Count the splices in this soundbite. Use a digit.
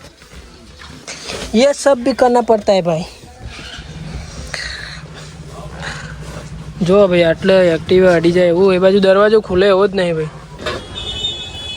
1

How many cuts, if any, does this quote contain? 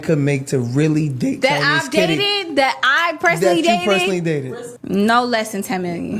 0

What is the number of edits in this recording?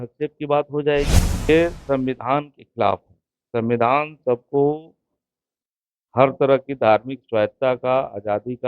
1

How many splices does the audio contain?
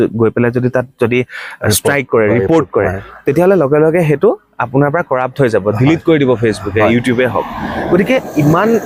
0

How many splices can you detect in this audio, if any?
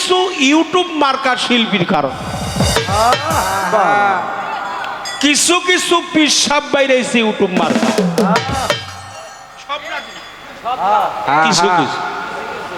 0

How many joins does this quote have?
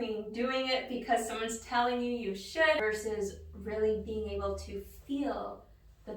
1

